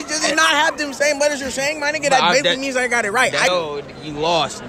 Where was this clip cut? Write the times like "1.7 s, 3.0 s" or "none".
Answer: 3.5 s